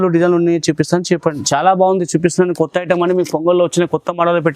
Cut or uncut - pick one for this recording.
cut